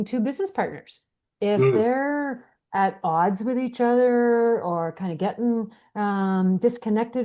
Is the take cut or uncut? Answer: uncut